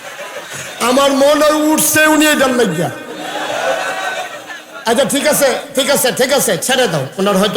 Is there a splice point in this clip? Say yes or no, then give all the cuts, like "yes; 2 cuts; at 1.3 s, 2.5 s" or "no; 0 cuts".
no; 0 cuts